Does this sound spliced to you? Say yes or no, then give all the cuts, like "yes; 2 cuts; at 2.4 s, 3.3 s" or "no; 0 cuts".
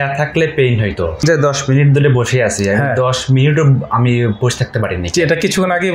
yes; 1 cut; at 1.2 s